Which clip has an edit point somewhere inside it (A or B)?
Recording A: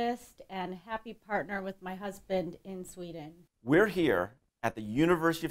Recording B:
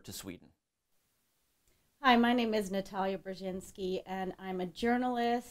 A